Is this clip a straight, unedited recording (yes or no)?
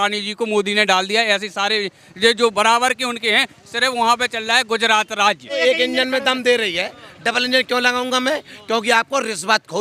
no